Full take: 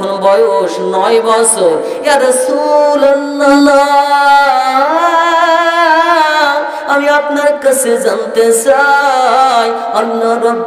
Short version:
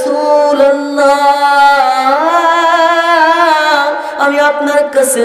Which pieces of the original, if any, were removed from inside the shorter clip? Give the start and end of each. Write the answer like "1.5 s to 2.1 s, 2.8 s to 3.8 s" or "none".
3.4 s to 3.7 s